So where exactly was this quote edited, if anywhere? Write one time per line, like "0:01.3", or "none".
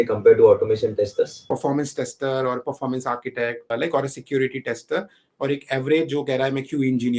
0:01.4
0:03.7